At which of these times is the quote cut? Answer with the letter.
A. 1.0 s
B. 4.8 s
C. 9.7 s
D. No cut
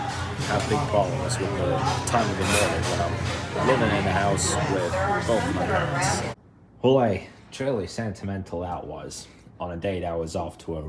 D